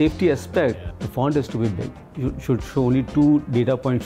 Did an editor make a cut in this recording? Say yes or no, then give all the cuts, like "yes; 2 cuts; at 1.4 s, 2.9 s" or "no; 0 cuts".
yes; 2 cuts; at 0.7 s, 2.1 s